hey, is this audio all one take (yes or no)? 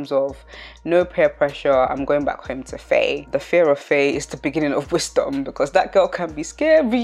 yes